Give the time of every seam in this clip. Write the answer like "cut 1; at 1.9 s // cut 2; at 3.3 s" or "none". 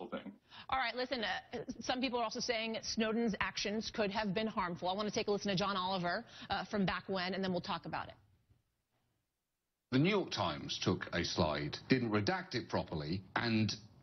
none